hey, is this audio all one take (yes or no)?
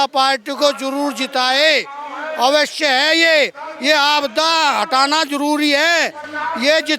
yes